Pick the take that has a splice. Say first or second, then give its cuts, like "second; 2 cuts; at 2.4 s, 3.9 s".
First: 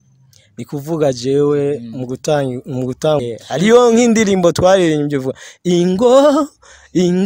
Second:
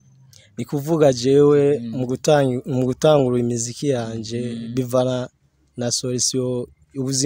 first; 1 cut; at 3.2 s